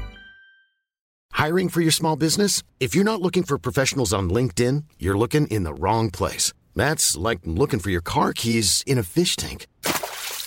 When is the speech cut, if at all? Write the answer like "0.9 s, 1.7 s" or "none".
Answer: 1.1 s